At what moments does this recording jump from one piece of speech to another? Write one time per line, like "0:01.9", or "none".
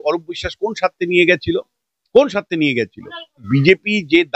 0:03.4